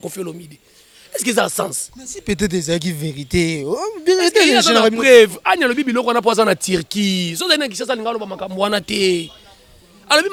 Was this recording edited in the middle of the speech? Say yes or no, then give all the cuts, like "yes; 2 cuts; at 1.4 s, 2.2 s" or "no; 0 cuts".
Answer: no; 0 cuts